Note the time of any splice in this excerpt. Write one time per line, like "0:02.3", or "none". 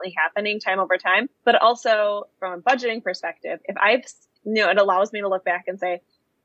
0:01.3